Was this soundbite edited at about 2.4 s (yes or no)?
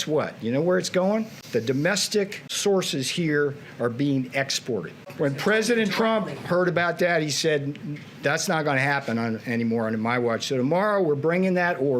yes